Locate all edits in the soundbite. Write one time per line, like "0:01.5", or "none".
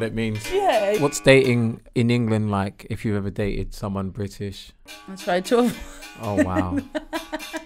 0:01.0
0:01.8
0:05.2